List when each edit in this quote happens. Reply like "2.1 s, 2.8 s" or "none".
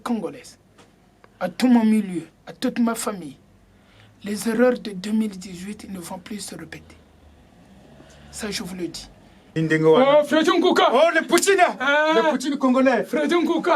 9.6 s